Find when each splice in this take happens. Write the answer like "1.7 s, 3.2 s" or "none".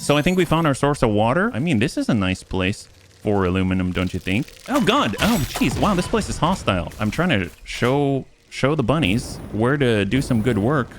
1.6 s, 6.9 s